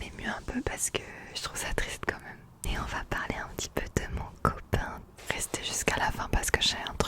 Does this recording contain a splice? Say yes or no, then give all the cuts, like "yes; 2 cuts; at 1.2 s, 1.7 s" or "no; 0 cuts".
yes; 2 cuts; at 2.6 s, 5.1 s